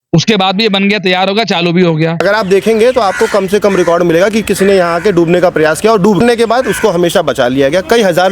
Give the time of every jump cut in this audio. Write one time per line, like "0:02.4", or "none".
0:02.2
0:06.2